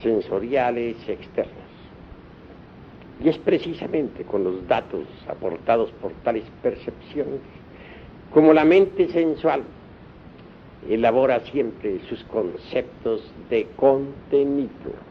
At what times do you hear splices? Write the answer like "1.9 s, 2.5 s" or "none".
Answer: none